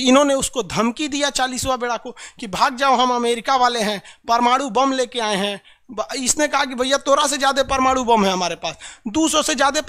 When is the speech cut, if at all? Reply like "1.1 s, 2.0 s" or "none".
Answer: none